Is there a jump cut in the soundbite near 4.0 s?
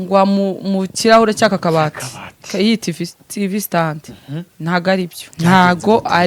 no; 1 cut; at 5.2 s

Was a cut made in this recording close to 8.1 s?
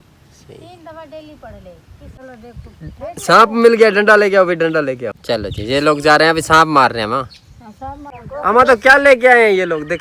yes; 3 cuts; at 2.2 s, 5.1 s, 8.1 s

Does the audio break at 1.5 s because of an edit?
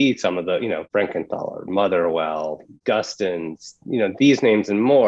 no; 1 cut; at 2.7 s

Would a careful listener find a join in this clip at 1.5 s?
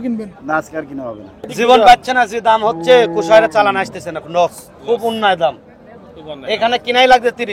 yes; 1 cut; at 1.5 s

